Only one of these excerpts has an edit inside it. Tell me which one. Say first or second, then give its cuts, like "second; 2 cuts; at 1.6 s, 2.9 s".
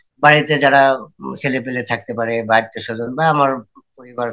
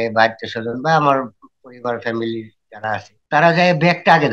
second; 1 cut; at 3.1 s